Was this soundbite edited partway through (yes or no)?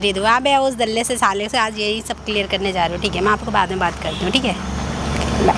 no